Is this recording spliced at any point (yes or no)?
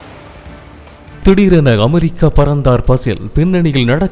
yes